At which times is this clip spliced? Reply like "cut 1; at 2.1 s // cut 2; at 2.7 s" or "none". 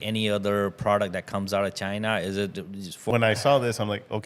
cut 1; at 3.0 s